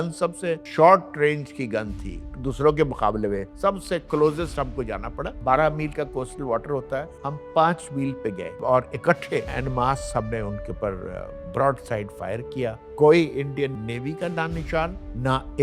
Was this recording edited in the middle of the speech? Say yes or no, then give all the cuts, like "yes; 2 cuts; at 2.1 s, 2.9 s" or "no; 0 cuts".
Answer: yes; 4 cuts; at 3.5 s, 8.6 s, 9.5 s, 12.8 s